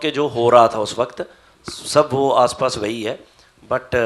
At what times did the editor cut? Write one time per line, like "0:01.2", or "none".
none

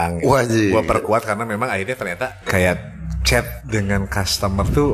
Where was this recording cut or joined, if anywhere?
0:02.4
0:03.6

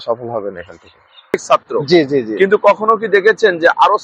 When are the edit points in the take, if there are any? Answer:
0:01.3

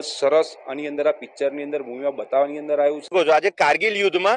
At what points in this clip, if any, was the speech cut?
0:03.1

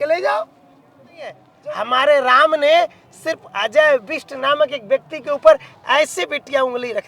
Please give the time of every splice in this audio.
0:01.5

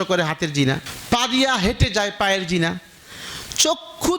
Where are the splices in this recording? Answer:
0:00.9

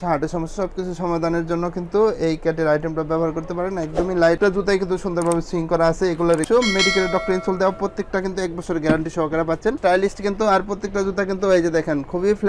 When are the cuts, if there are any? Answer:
0:04.4
0:06.4
0:09.7

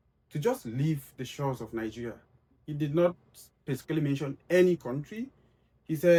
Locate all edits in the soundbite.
none

